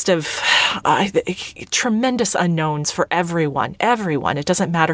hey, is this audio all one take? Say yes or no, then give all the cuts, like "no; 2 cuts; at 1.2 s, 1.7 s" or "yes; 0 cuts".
yes; 0 cuts